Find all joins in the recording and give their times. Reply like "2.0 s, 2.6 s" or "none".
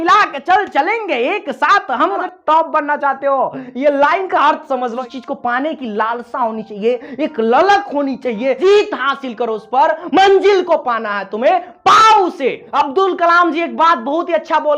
2.2 s, 5.0 s, 8.6 s, 12.6 s